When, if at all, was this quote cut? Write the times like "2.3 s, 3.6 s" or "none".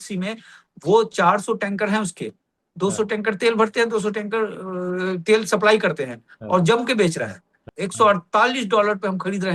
7.6 s

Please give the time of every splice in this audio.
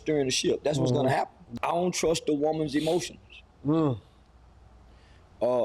1.4 s

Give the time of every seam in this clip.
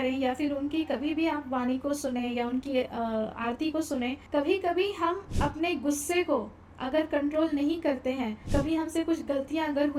4.2 s, 8.4 s

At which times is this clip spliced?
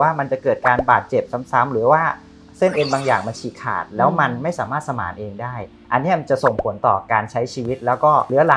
none

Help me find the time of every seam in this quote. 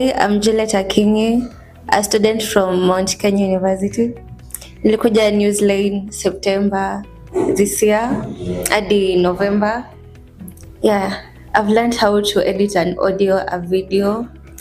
13.5 s

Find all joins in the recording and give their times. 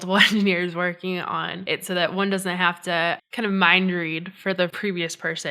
1.5 s, 3.3 s, 4.8 s

